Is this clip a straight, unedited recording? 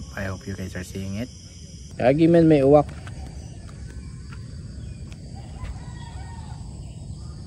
no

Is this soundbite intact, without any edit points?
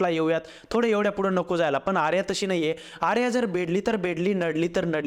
yes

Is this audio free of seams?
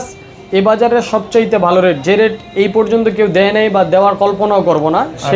yes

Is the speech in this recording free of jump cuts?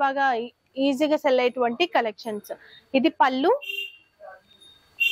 yes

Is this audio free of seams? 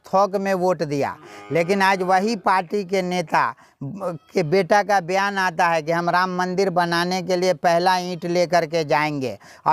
yes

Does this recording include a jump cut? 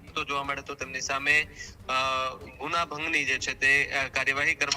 no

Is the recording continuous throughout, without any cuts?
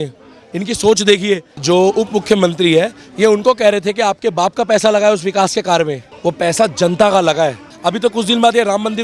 no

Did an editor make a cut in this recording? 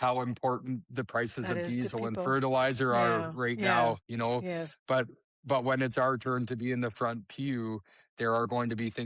no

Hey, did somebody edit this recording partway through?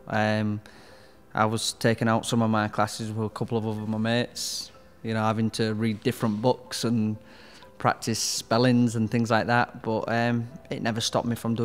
no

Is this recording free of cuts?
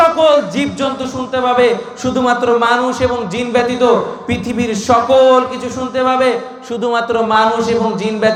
yes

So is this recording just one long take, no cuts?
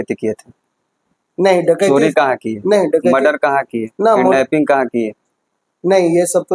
yes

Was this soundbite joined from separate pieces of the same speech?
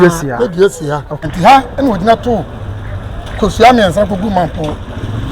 yes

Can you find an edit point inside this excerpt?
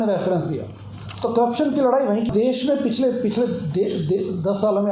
yes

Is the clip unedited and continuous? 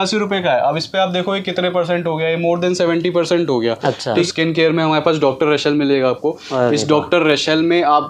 no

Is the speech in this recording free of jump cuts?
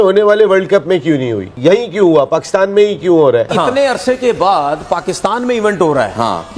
no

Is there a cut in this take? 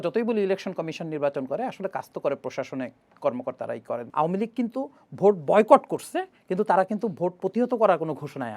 yes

